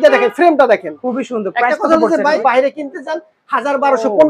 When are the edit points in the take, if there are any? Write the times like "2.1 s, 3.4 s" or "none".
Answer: 2.3 s